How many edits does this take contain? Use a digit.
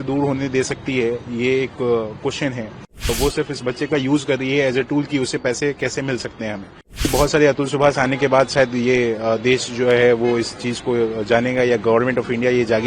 2